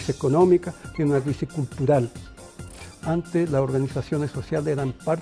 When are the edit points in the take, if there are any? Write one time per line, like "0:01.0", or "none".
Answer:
0:02.8